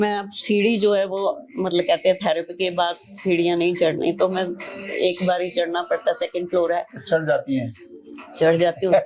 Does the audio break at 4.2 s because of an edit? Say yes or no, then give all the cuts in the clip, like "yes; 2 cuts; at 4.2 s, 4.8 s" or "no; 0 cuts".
no; 0 cuts